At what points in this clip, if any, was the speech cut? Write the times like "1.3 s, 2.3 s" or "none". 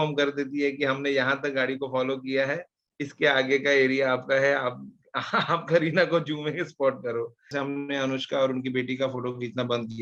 7.5 s